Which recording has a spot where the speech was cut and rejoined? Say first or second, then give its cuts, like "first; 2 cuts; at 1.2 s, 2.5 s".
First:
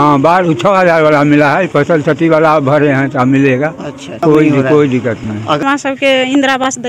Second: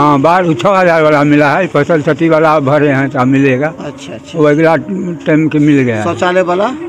first; 2 cuts; at 4.2 s, 5.6 s